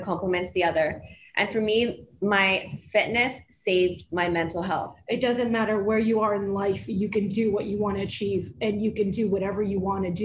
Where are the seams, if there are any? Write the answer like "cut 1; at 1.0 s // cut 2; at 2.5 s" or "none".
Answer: cut 1; at 4.9 s

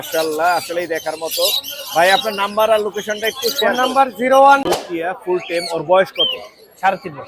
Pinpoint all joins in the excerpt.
cut 1; at 4.6 s

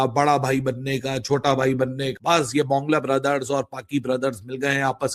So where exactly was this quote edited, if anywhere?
cut 1; at 2.1 s

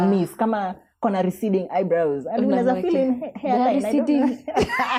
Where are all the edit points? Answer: none

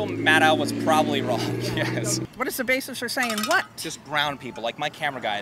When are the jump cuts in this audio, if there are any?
cut 1; at 2.2 s

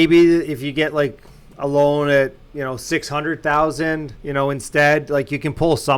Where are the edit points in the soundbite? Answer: cut 1; at 4.1 s

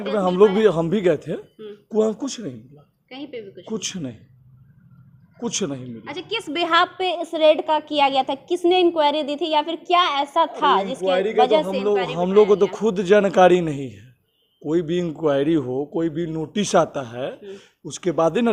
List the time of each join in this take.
none

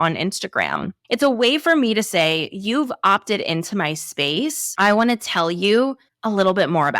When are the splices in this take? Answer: cut 1; at 4.6 s

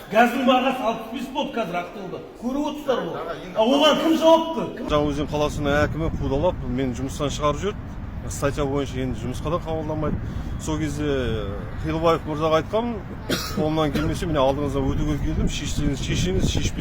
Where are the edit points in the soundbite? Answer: cut 1; at 4.8 s

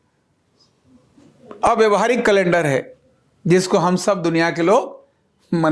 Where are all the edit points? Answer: none

